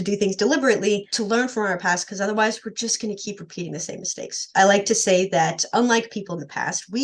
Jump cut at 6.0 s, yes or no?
no